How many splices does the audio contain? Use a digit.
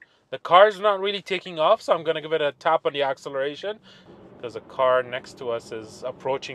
1